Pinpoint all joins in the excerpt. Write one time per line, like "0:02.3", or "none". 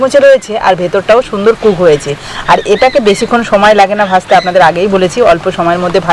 none